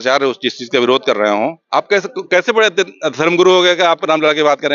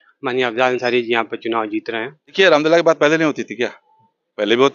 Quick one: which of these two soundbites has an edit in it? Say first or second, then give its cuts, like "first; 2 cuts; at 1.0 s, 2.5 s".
second; 1 cut; at 2.2 s